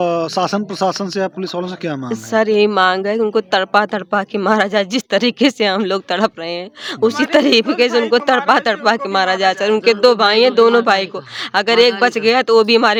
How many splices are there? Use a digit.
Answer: 0